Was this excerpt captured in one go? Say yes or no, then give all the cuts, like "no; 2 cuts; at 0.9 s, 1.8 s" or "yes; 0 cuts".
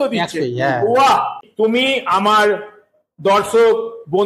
no; 1 cut; at 1.4 s